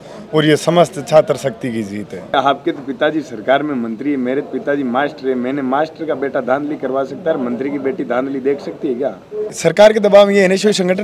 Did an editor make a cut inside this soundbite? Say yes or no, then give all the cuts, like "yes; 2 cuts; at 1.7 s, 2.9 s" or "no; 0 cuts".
yes; 2 cuts; at 2.3 s, 9.5 s